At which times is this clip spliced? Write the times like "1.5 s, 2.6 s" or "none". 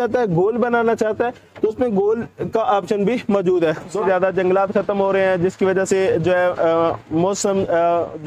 4.0 s